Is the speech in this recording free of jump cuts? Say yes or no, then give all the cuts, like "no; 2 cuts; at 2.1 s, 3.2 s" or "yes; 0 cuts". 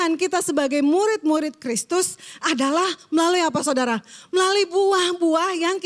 yes; 0 cuts